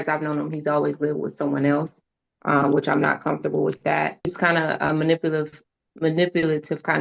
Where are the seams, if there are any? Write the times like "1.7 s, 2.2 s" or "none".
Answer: 4.3 s